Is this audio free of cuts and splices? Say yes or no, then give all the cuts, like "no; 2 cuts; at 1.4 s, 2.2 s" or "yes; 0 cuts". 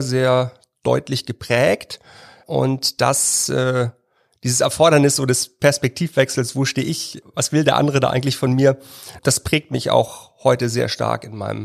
no; 3 cuts; at 2.4 s, 7.2 s, 9.1 s